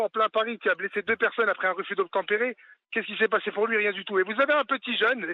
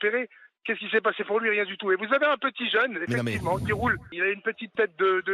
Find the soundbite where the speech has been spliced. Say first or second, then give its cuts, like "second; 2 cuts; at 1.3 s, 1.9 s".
second; 1 cut; at 4.1 s